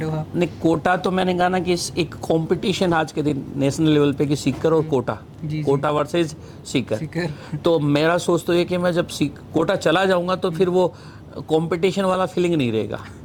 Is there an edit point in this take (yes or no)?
no